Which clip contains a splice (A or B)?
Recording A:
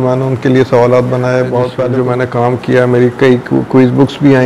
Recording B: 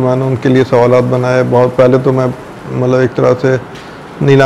A